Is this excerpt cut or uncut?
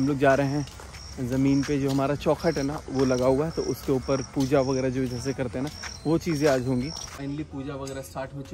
cut